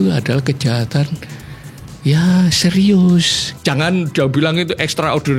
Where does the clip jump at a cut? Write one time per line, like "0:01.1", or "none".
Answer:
0:03.5